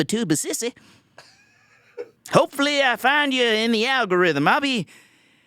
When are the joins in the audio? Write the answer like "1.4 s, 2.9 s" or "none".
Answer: 2.2 s